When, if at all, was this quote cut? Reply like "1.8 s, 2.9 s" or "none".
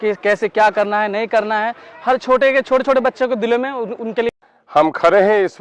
4.4 s